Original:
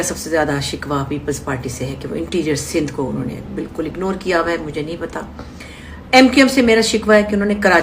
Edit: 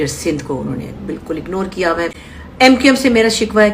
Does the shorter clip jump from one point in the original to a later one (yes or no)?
yes